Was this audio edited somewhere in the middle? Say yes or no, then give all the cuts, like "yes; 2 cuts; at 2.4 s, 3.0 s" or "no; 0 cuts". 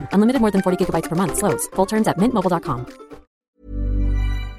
yes; 1 cut; at 3.5 s